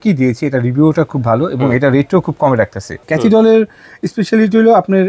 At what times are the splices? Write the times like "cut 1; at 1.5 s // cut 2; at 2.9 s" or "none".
cut 1; at 2.9 s